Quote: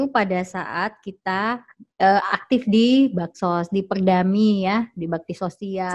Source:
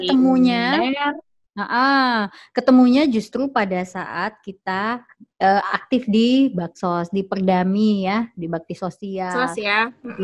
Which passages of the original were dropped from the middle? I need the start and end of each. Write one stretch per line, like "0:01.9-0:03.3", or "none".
none